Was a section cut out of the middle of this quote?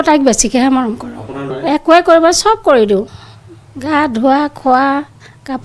yes; 1 cut; at 1.5 s

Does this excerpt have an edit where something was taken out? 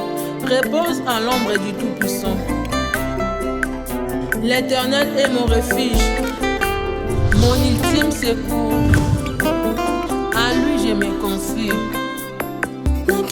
no; 0 cuts

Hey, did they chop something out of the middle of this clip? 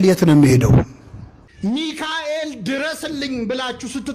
yes; 1 cut; at 1.6 s

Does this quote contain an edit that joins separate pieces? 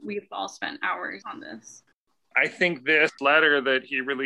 yes; 3 cuts; at 1.2 s, 2.3 s, 3.2 s

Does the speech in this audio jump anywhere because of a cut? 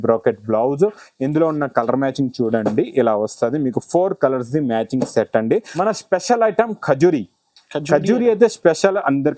yes; 1 cut; at 5.7 s

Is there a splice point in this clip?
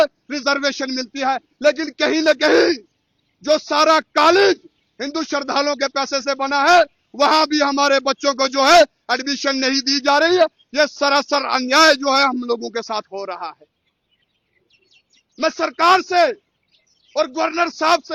no; 0 cuts

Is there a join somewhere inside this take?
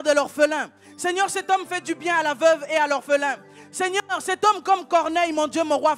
no; 0 cuts

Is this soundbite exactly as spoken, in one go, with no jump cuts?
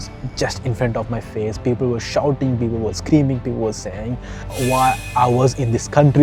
yes; 0 cuts

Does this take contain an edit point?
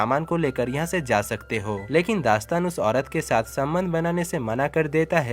yes; 1 cut; at 1.8 s

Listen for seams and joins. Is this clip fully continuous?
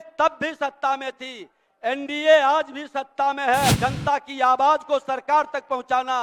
no; 1 cut; at 3.8 s

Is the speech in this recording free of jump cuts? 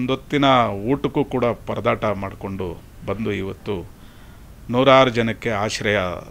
yes; 0 cuts

